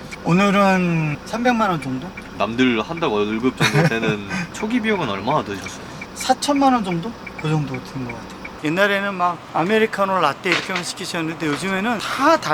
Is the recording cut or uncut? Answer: cut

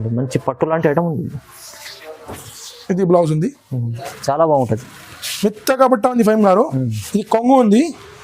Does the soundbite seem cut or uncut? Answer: cut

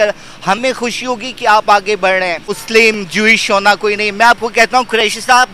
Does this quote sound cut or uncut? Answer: cut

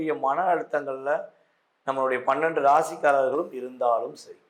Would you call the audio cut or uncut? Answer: uncut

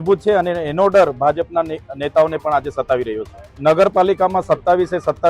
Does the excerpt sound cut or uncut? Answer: cut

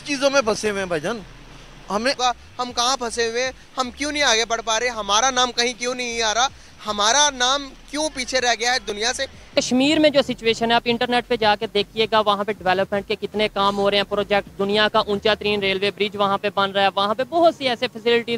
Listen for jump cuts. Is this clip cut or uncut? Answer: cut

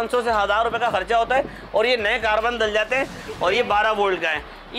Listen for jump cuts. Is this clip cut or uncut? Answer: cut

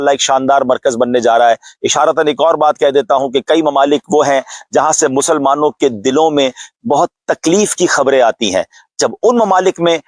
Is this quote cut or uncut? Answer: uncut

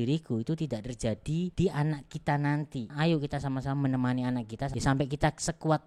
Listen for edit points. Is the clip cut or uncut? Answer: cut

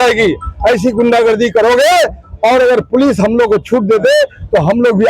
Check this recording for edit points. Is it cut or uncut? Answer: uncut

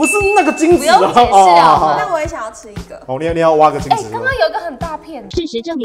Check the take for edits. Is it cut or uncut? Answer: uncut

